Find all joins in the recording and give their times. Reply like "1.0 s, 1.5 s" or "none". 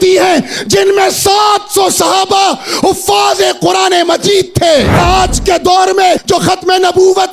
5.0 s, 6.2 s